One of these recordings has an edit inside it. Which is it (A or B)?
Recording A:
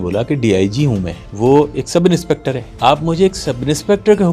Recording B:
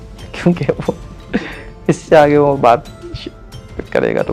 A